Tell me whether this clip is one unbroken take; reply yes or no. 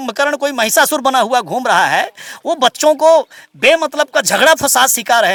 yes